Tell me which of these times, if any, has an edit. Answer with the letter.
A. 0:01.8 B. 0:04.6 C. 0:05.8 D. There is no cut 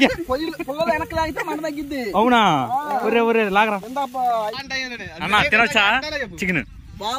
B